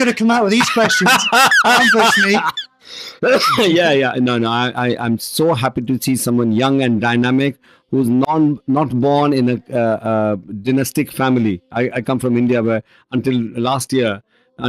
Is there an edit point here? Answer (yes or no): yes